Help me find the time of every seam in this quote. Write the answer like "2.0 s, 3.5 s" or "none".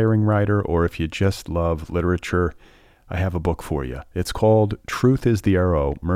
none

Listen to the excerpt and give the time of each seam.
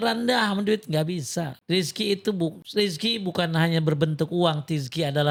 none

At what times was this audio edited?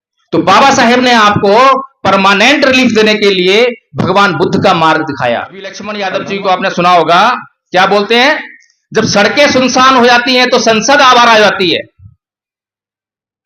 5.9 s

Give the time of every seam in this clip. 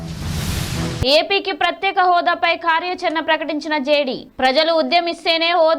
1.0 s

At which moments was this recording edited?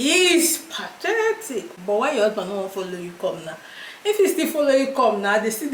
none

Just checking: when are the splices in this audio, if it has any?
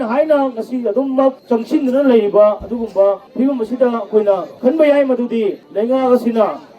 1.4 s, 3.3 s, 4.5 s, 5.6 s

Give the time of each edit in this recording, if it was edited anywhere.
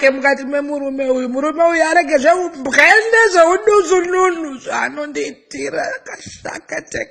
4.0 s

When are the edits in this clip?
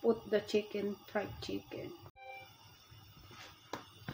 2.2 s

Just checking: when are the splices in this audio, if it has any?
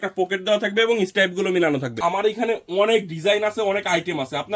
1.9 s

